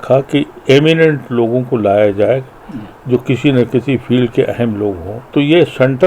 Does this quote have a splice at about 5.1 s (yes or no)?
yes